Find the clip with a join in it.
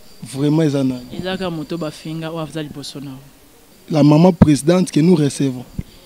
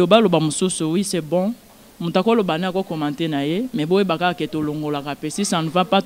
first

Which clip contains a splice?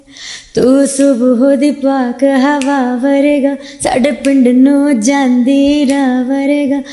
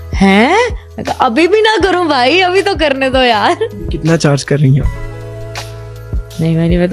second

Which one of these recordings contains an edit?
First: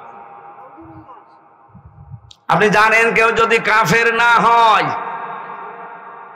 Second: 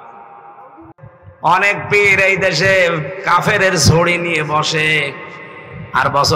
second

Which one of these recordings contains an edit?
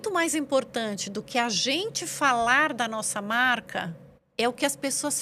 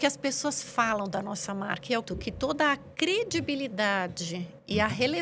second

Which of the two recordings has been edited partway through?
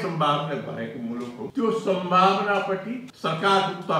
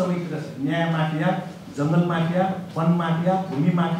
first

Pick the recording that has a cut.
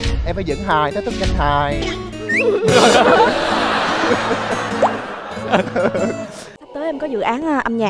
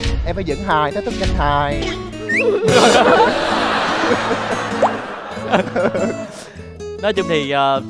first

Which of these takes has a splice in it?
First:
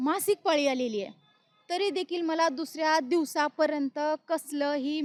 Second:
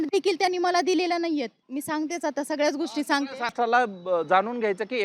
second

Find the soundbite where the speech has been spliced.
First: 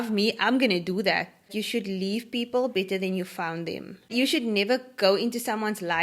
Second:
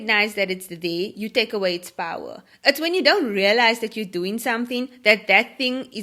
first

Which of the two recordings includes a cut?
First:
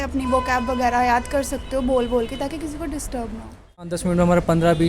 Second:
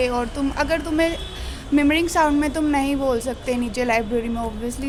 first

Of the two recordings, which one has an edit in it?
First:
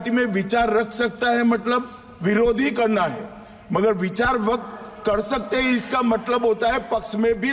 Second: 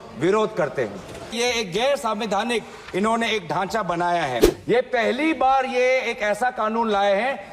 second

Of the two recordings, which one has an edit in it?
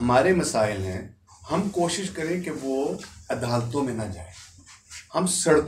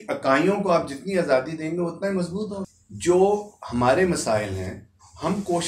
second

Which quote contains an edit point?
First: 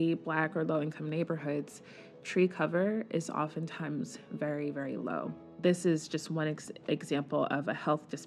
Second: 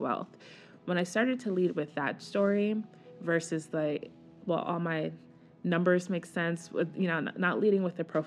first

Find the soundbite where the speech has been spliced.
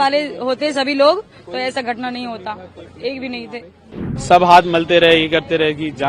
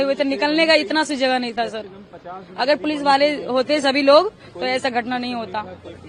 first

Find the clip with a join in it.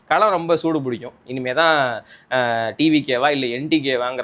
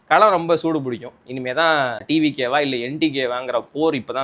second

